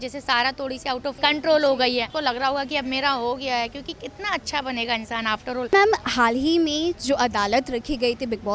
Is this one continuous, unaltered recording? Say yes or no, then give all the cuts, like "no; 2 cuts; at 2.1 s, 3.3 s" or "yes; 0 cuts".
no; 3 cuts; at 1.2 s, 2.1 s, 5.7 s